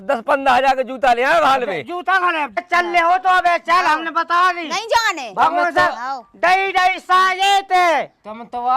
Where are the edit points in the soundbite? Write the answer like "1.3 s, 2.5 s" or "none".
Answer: 2.6 s